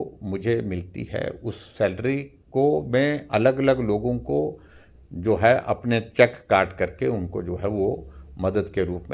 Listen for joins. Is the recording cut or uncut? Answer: uncut